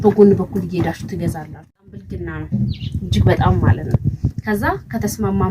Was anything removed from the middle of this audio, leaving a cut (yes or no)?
yes